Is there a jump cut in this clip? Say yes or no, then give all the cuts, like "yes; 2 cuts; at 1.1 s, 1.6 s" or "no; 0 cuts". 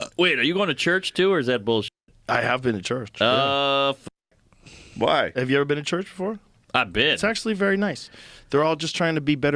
no; 0 cuts